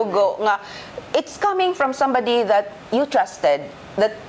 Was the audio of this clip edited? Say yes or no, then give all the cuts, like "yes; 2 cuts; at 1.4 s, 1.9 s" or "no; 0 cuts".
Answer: no; 0 cuts